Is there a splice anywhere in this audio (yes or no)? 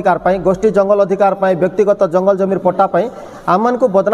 no